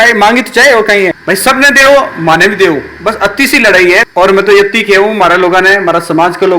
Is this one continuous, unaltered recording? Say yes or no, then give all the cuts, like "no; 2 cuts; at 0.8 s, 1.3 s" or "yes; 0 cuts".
no; 2 cuts; at 1.2 s, 4.1 s